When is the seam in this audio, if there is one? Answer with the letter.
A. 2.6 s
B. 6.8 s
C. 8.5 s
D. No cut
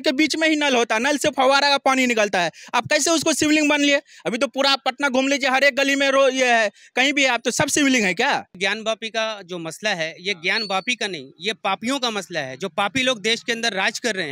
C